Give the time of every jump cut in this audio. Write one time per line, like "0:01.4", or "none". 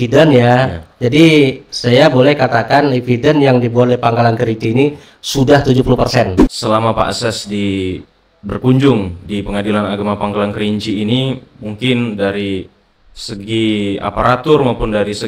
0:06.5